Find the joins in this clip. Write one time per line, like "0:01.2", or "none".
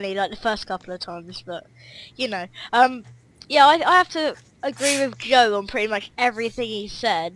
none